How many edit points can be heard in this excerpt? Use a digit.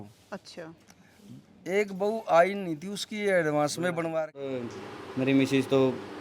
1